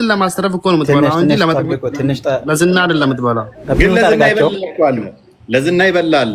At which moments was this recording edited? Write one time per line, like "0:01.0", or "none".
0:03.6

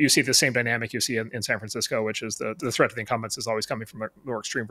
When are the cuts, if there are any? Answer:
0:02.6

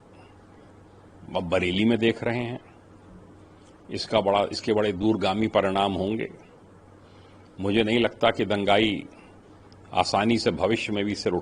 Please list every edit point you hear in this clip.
none

